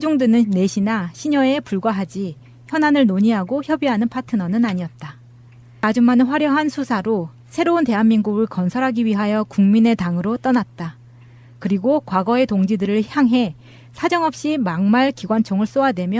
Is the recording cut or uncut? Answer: cut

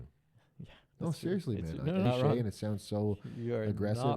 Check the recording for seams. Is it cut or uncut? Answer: cut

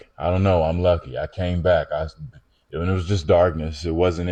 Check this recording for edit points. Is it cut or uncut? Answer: uncut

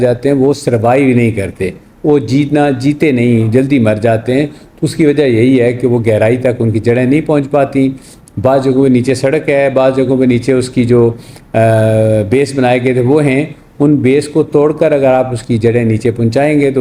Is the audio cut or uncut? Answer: uncut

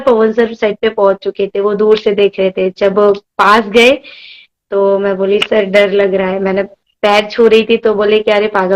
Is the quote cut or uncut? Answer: uncut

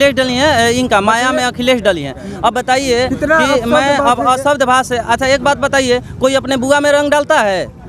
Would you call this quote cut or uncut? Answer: uncut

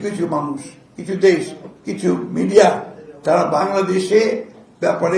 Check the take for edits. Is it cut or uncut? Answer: uncut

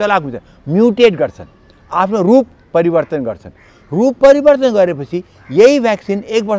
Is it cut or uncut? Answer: uncut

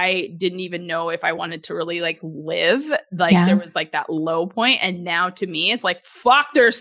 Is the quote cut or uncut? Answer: uncut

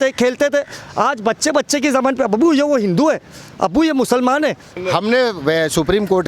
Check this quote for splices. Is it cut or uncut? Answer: cut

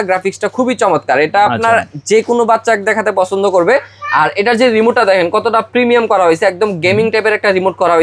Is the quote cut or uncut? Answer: uncut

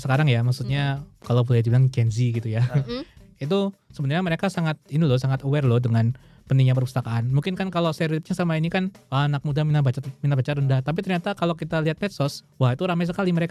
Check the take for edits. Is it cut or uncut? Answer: cut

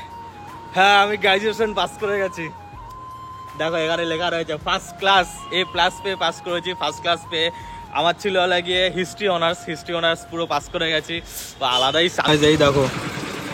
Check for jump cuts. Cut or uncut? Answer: uncut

